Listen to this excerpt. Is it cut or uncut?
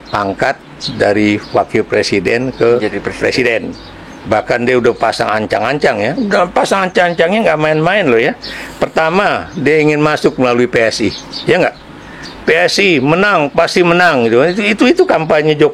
uncut